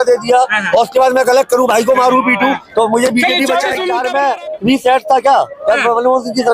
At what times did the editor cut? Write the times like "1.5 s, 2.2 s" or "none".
3.9 s